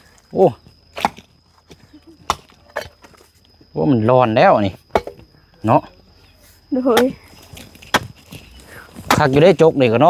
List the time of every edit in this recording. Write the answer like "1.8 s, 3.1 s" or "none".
none

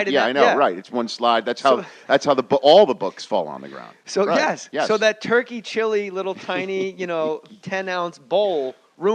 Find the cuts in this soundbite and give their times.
none

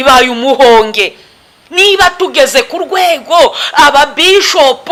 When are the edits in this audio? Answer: none

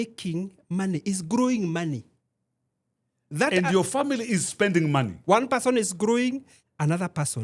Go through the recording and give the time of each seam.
5.1 s

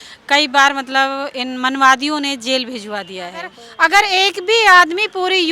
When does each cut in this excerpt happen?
3.6 s

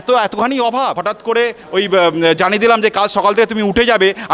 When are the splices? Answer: 1.1 s

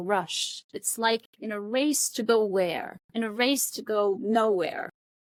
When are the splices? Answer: none

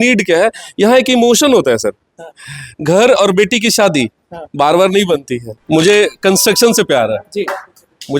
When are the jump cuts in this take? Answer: 5.5 s

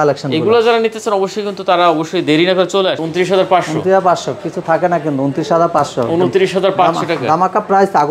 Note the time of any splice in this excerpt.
3.0 s

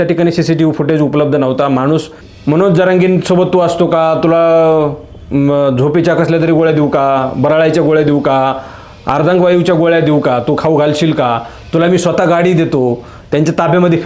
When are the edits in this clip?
2.3 s

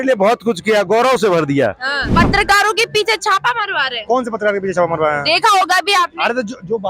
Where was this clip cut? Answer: 2.1 s

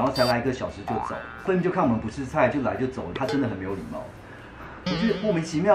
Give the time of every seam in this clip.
1.4 s, 3.1 s

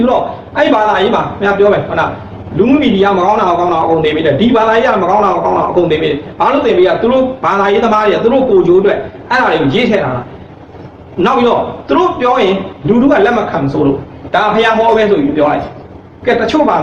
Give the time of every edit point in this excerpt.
none

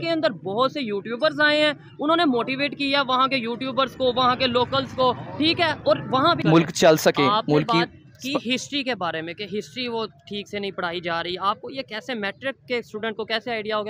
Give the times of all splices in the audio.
6.4 s

